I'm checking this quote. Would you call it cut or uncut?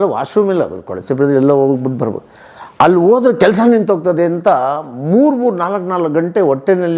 uncut